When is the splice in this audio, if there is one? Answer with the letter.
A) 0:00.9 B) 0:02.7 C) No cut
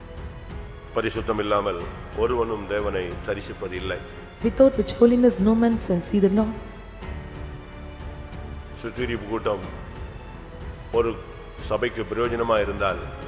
A